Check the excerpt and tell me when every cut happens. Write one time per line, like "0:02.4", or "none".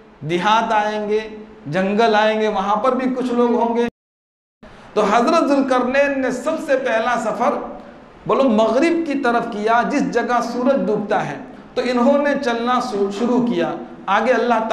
0:04.4

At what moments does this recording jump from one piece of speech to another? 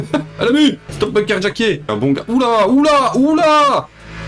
0:00.9
0:01.9

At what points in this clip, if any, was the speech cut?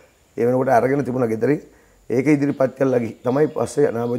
none

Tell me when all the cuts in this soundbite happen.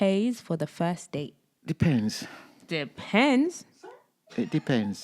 0:01.4

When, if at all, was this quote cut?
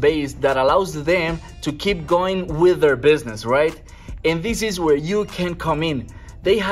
none

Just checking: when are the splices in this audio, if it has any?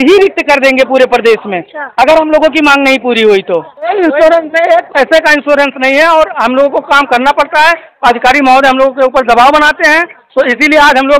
0:03.9

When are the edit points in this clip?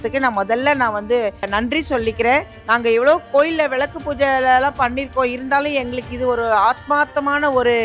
0:01.5
0:02.6

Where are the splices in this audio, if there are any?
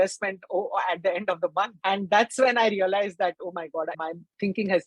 0:01.7
0:04.0

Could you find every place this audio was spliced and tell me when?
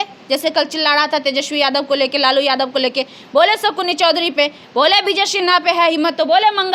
none

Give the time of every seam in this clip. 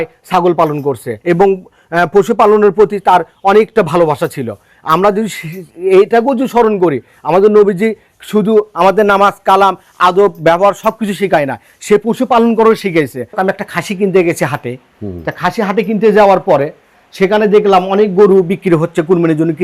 0:01.1
0:13.4

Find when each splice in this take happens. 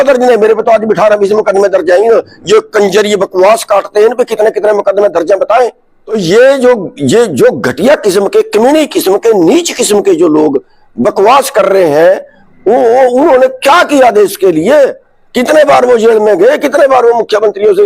0:06.2

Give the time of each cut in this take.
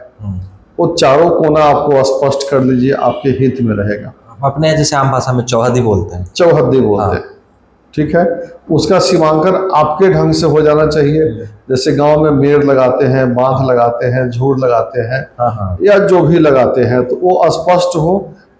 none

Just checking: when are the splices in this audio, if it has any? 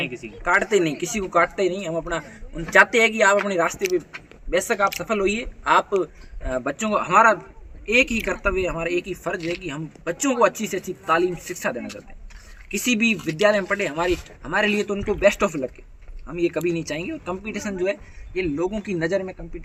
none

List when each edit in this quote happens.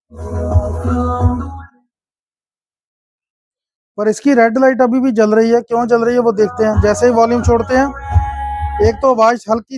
none

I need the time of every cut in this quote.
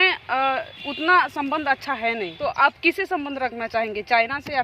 0:02.3

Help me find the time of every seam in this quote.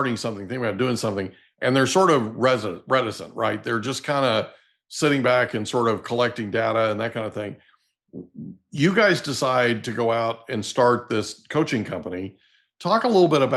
none

